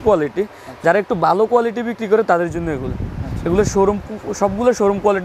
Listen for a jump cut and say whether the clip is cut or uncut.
uncut